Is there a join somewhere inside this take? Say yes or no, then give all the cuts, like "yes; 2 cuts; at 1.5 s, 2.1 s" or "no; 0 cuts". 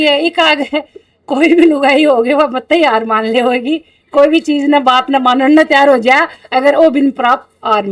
no; 0 cuts